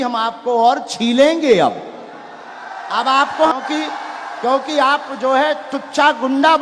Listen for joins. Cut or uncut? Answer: cut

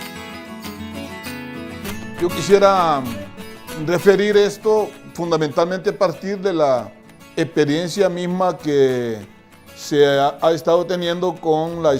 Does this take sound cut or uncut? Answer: cut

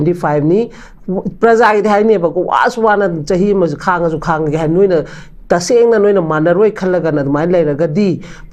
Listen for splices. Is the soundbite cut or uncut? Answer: uncut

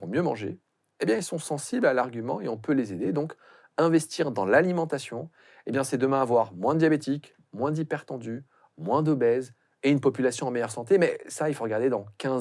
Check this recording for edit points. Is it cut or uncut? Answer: uncut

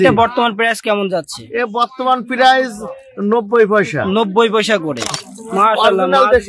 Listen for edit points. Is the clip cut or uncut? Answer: cut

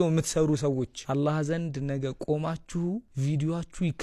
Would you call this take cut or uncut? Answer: cut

